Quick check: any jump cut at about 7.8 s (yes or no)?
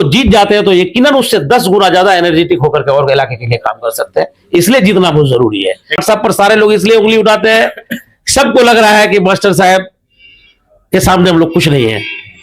no